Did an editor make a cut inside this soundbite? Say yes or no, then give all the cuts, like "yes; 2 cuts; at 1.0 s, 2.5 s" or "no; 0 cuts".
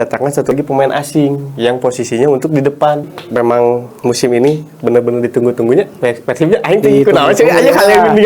yes; 1 cut; at 3.1 s